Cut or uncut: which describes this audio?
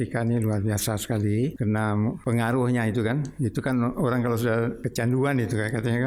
cut